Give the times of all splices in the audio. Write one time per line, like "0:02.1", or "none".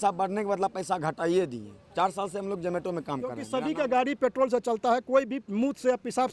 0:03.4